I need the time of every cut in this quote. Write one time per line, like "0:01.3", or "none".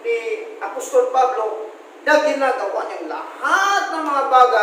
none